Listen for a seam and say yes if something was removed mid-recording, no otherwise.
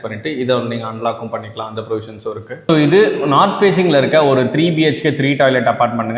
yes